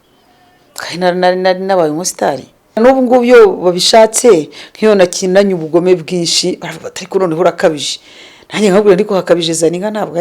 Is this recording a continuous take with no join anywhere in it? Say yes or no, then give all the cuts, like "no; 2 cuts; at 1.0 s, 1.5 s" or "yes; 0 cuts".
no; 1 cut; at 2.8 s